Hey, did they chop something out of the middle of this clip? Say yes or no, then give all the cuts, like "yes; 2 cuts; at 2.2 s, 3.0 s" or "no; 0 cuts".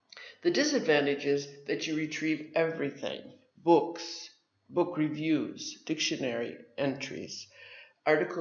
yes; 1 cut; at 6.0 s